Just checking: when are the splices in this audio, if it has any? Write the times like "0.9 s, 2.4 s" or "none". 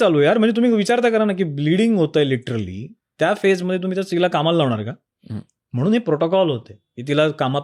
none